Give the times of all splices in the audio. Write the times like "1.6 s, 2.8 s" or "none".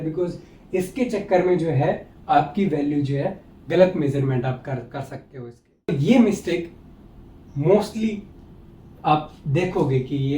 5.9 s